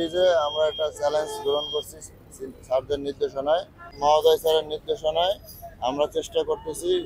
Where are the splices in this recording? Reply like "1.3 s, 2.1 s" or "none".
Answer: 3.9 s